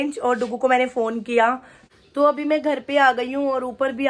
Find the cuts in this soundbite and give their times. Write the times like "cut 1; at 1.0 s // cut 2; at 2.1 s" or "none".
cut 1; at 1.7 s